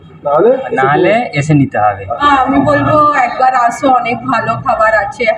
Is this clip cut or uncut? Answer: cut